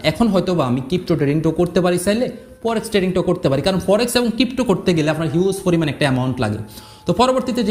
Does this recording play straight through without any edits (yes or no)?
yes